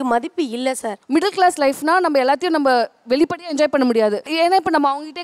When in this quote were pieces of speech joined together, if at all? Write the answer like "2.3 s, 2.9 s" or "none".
0.9 s